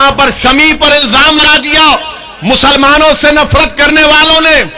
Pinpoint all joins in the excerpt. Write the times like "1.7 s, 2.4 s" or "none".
1.4 s